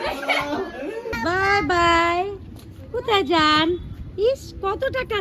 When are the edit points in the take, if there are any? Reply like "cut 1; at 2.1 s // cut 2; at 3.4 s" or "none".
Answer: cut 1; at 1.0 s